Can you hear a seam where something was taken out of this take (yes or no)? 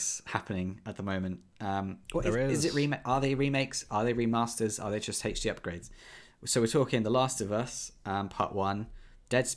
no